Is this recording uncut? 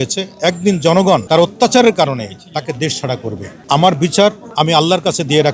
no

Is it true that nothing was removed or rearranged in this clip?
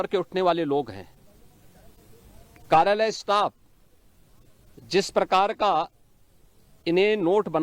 yes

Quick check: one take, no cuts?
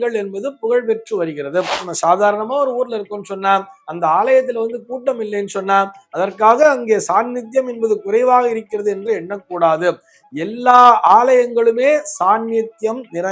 no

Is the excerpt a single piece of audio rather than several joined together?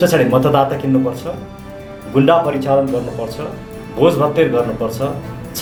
yes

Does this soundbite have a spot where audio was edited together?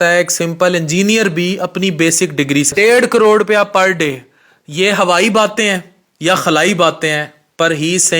yes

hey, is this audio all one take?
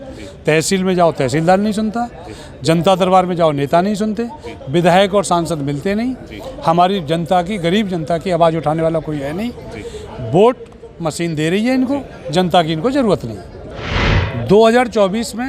no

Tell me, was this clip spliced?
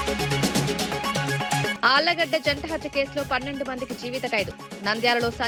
no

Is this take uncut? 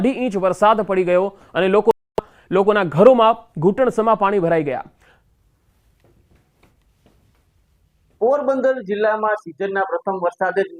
no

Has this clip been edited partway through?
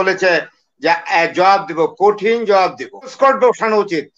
yes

